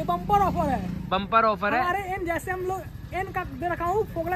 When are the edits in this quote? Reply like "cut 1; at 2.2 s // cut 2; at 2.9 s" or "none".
none